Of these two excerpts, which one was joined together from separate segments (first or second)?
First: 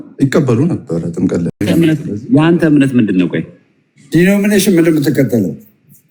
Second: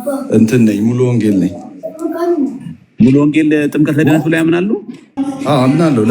second